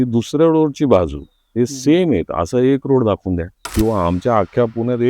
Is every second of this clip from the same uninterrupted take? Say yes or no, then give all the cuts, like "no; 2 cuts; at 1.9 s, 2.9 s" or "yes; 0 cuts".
no; 1 cut; at 3.6 s